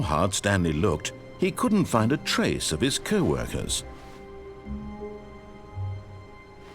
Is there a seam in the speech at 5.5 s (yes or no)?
no